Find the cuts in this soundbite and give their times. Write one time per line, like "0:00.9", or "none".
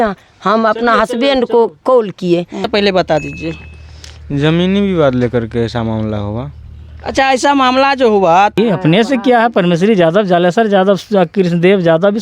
0:02.7
0:08.5